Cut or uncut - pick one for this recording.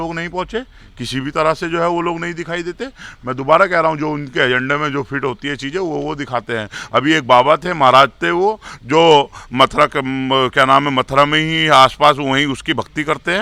uncut